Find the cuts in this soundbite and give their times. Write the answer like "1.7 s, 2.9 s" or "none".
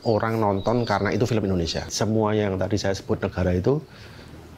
1.9 s